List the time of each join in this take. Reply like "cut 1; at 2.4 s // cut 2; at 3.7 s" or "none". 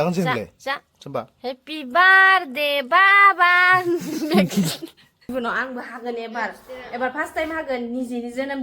cut 1; at 5.3 s